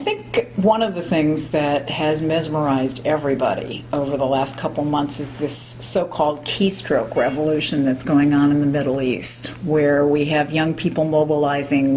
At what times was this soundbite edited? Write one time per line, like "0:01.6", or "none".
none